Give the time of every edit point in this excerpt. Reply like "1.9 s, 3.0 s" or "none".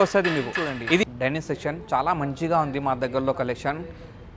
1.0 s